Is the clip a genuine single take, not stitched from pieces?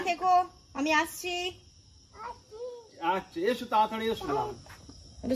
no; 1 cut; at 4.2 s

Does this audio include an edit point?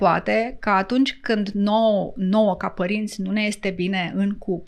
no; 0 cuts

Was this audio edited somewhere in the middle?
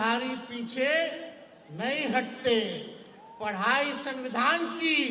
no; 0 cuts

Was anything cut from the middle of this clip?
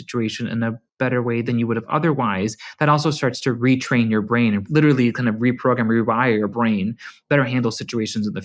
yes; 3 cuts; at 1.4 s, 4.6 s, 7.2 s

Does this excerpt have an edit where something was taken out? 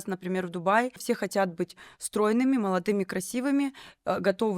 yes; 1 cut; at 1.0 s

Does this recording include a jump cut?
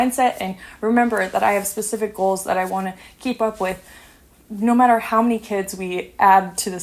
no; 0 cuts

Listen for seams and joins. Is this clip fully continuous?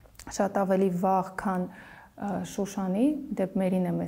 yes; 0 cuts

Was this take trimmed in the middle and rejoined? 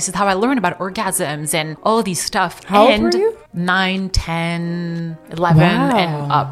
yes; 1 cut; at 1.7 s

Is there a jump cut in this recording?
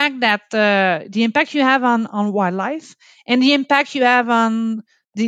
no; 0 cuts

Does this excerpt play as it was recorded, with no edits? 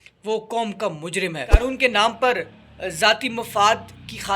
no; 1 cut; at 1.6 s

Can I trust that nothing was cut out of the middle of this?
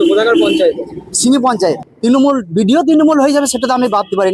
no; 1 cut; at 1.9 s

